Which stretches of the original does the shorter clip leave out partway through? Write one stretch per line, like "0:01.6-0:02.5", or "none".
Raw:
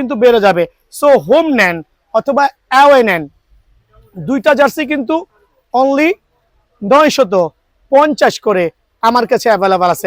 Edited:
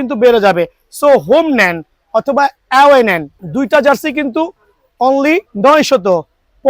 0:03.3-0:04.1
0:06.2-0:06.8

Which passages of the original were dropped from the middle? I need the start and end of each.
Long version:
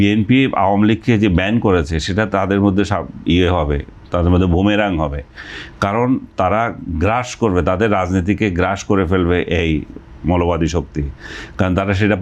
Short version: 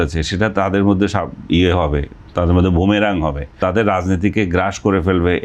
0:05.4-0:07.6

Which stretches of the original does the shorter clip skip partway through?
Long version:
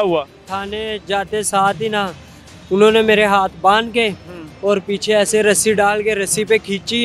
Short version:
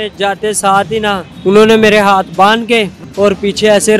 0:02.2-0:02.5
0:04.3-0:04.5

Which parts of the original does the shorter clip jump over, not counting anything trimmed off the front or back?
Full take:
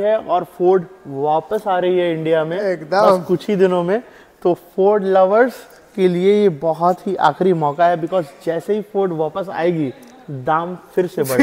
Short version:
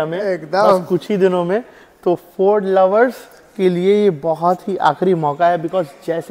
none

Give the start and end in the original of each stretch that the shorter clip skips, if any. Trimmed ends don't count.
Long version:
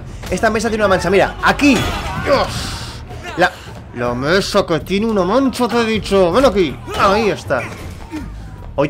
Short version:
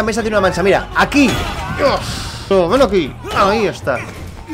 0:02.9-0:06.1

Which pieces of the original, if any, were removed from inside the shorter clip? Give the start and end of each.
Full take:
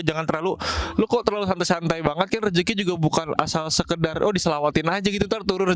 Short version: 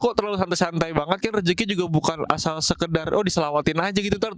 none

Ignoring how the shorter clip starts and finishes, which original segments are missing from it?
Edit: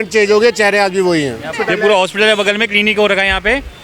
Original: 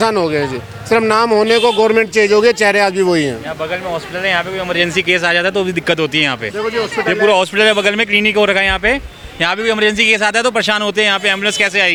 0:03.5-0:06.9

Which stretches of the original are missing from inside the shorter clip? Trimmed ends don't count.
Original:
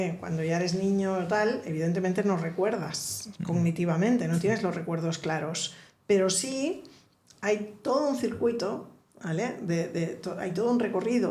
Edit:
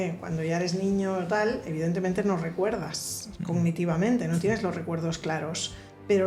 none

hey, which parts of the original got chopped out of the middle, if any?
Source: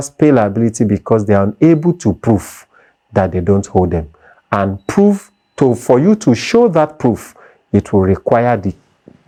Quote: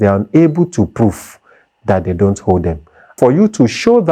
0:04.4-0:05.8

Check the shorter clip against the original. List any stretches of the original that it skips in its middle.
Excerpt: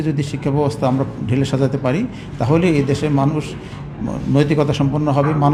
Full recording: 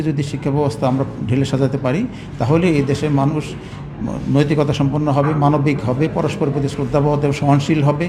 none

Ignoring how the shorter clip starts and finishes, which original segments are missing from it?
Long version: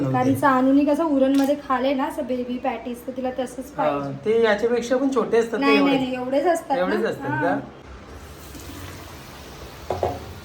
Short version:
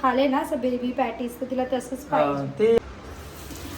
0:04.4-0:07.8

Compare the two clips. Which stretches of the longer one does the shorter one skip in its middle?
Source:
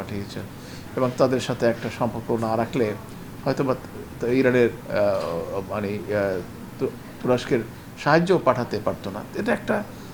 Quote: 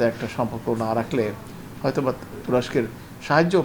0:03.9-0:07.1

